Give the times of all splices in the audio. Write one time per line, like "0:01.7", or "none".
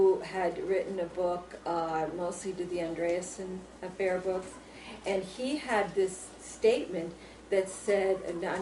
0:01.8